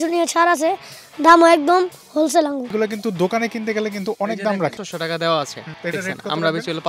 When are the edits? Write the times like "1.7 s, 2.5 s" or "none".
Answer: 2.7 s, 4.8 s, 5.6 s